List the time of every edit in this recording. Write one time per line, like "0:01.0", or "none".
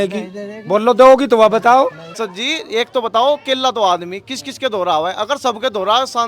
0:02.1

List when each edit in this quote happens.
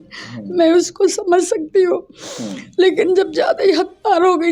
none

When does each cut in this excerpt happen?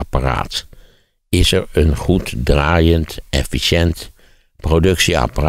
none

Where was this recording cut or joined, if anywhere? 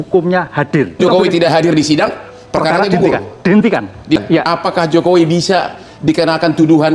0:01.0
0:04.2

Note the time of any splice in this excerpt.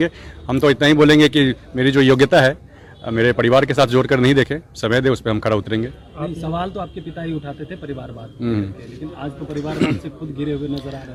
none

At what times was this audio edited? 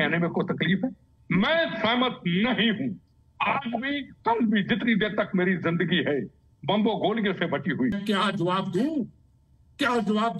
0:07.9

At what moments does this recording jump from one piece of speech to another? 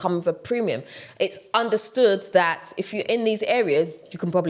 none

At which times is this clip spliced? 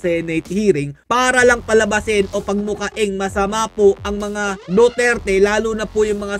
none

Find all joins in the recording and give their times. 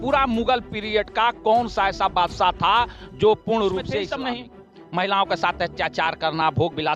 0:04.0

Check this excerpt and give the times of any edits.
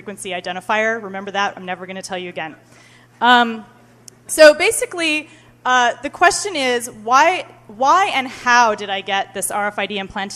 none

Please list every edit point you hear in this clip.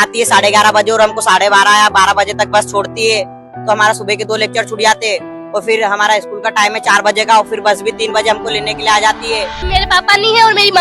0:09.6

